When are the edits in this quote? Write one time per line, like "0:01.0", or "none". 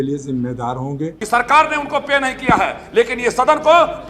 0:01.1